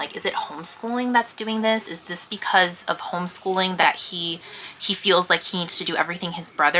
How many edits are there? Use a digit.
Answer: 0